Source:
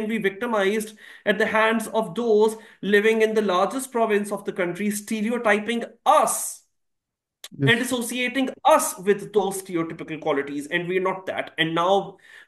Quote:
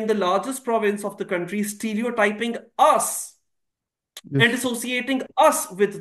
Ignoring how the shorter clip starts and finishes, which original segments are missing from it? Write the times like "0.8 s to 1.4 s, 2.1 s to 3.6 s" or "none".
none